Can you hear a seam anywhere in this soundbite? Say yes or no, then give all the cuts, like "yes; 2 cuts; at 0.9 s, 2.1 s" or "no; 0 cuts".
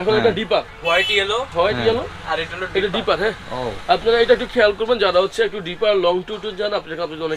no; 0 cuts